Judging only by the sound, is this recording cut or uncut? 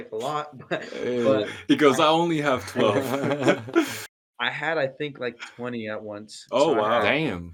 uncut